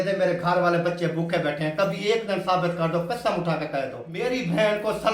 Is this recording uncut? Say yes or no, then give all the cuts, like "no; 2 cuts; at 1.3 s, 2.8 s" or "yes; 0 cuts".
no; 1 cut; at 4.2 s